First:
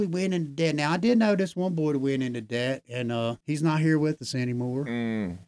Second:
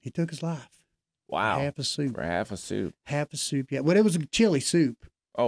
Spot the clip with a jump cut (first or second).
first